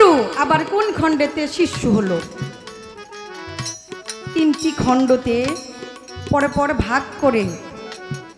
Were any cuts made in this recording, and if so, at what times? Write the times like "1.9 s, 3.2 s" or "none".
none